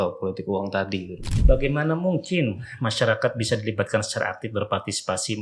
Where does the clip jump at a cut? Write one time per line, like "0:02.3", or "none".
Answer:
0:01.3